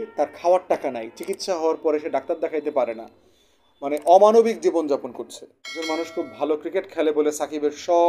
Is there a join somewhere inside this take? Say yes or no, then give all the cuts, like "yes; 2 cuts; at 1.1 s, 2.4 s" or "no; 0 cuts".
yes; 1 cut; at 5.8 s